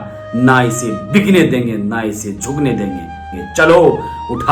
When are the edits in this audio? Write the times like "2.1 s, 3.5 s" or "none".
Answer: 3.3 s